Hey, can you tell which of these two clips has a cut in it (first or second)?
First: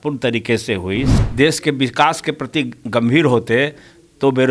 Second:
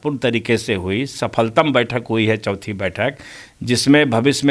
first